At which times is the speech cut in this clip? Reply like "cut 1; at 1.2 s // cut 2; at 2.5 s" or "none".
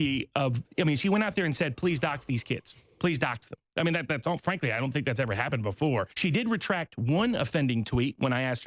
cut 1; at 6.1 s